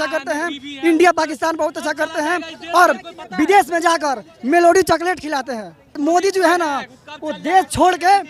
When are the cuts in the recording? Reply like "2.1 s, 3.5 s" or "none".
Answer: 6.0 s